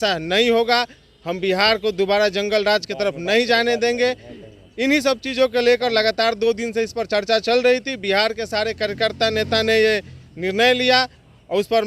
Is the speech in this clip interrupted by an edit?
no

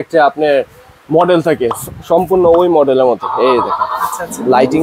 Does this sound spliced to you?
no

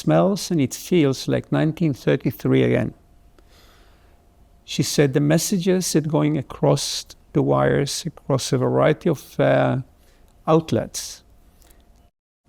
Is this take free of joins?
yes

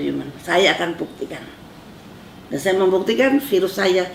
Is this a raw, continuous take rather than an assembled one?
yes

